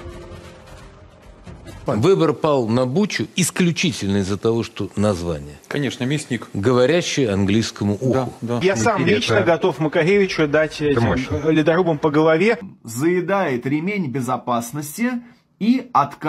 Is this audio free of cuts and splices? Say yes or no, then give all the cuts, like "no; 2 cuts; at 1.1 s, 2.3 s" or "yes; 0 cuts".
no; 3 cuts; at 1.8 s, 8.6 s, 12.7 s